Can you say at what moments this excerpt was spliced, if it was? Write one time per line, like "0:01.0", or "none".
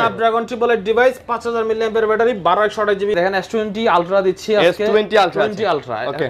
0:03.1